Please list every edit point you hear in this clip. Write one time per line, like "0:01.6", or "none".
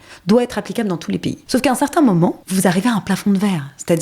0:01.3
0:02.4